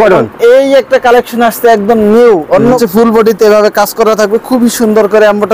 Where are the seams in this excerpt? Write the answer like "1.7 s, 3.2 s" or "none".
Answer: 2.8 s